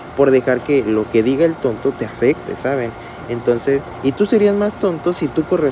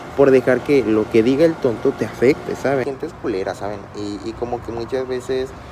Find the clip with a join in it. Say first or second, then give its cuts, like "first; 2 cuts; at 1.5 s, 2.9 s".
second; 1 cut; at 2.8 s